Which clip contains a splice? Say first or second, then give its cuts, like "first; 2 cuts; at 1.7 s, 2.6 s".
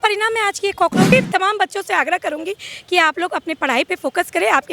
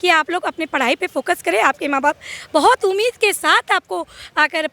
first; 1 cut; at 1.1 s